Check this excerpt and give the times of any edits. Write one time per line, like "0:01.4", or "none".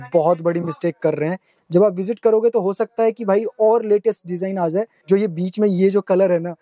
0:01.5
0:04.9